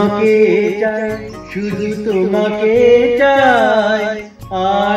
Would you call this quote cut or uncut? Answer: uncut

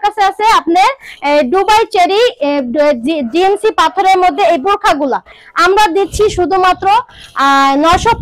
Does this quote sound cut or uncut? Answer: cut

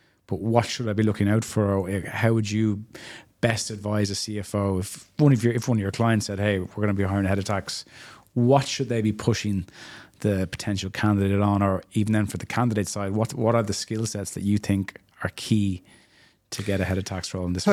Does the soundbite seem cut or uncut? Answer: uncut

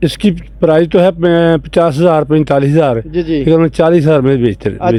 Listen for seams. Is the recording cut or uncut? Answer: uncut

